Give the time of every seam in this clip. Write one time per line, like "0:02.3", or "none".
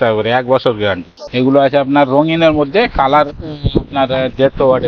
0:01.2